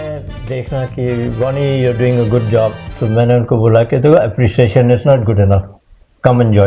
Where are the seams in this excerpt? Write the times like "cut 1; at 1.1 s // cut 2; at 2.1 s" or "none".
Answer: none